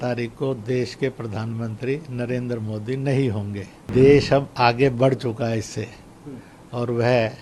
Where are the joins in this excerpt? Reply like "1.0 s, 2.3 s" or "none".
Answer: 3.9 s